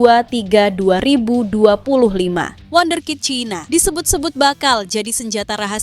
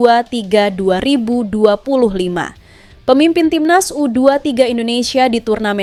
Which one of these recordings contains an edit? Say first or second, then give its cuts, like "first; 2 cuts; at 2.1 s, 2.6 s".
first; 1 cut; at 2.5 s